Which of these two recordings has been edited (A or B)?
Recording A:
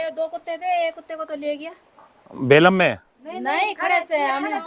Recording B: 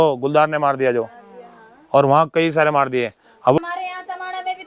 B